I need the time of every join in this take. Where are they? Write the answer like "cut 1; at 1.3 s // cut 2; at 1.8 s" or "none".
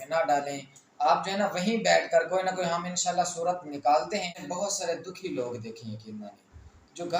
cut 1; at 4.4 s